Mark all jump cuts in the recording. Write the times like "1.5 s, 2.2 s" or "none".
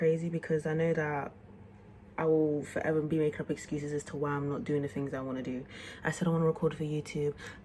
none

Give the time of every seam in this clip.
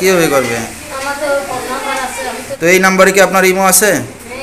2.5 s

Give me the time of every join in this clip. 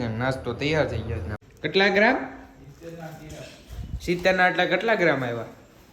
1.3 s

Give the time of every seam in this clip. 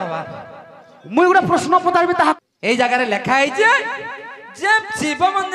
2.4 s

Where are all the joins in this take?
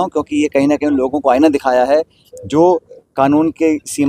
3.0 s

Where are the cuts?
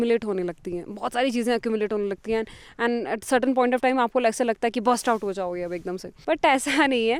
none

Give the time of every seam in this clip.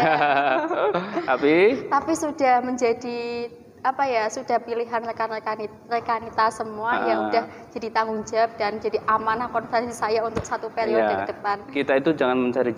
11.6 s

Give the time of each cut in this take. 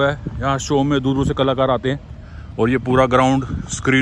none

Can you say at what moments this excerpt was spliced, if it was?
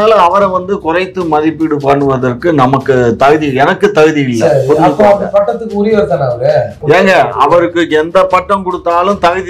6.8 s

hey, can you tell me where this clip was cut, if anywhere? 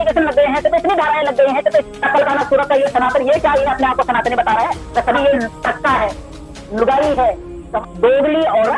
1.8 s, 5.2 s, 7.7 s

